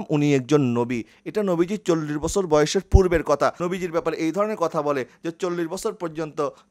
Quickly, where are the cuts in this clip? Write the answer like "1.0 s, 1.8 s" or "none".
3.6 s